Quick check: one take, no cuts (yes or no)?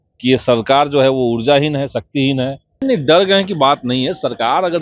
no